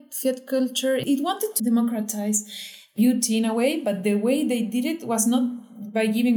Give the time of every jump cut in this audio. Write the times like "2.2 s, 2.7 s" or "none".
1.2 s, 2.9 s